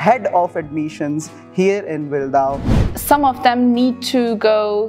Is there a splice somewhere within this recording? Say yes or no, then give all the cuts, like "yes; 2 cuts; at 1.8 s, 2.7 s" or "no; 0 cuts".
yes; 1 cut; at 2.7 s